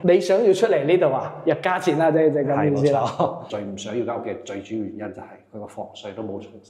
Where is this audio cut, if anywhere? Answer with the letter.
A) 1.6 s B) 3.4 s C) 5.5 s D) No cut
B